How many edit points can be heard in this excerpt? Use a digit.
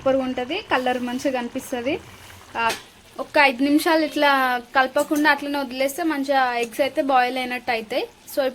1